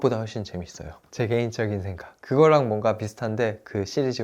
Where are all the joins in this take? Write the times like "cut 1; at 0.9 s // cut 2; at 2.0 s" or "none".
none